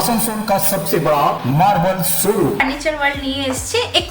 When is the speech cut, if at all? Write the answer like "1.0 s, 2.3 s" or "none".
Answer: 2.6 s